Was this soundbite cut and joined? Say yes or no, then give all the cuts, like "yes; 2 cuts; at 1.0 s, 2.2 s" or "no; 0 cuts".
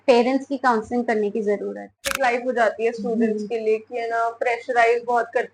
yes; 1 cut; at 2.1 s